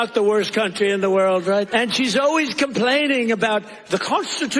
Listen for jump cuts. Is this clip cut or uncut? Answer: cut